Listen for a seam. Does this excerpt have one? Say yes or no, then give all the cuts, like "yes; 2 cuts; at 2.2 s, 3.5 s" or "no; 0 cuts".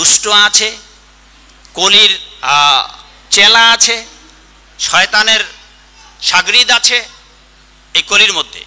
no; 0 cuts